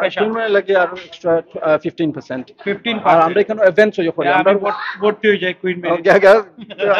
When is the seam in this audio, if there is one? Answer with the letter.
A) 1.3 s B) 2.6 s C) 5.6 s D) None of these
D